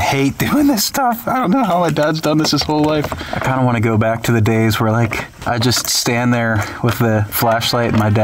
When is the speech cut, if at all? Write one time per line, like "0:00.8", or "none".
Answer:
0:03.2
0:05.3
0:07.3